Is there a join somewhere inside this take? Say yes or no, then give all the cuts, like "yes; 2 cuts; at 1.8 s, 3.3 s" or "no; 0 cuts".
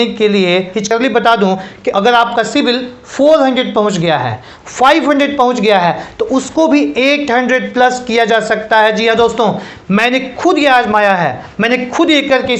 yes; 1 cut; at 0.9 s